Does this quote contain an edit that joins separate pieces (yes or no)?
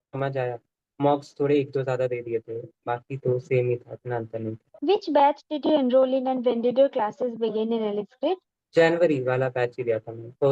no